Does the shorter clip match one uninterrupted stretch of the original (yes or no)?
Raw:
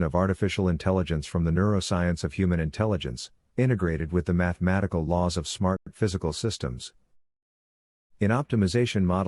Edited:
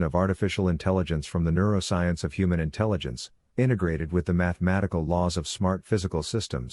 no